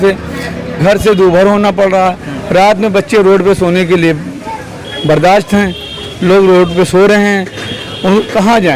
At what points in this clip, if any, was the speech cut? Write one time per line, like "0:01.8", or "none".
none